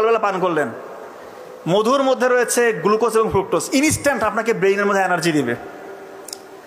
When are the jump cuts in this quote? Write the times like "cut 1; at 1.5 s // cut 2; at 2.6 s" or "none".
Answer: none